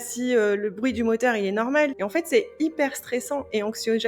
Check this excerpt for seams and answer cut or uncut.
cut